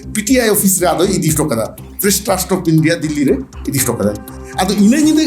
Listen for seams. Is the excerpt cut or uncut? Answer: cut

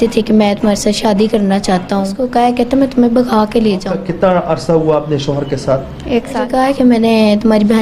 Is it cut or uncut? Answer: cut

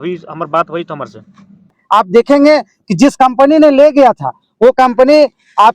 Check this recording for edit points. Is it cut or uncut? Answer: cut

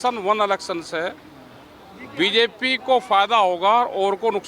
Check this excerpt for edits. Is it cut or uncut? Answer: uncut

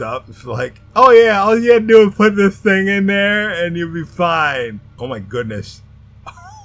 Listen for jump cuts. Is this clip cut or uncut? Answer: cut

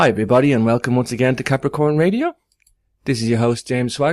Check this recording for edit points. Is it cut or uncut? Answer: uncut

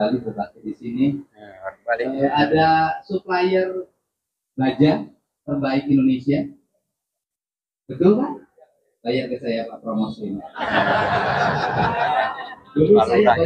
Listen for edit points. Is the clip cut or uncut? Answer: uncut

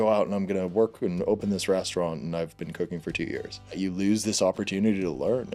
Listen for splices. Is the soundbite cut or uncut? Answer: cut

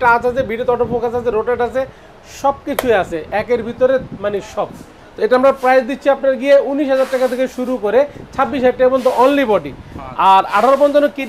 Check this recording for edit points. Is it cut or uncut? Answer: uncut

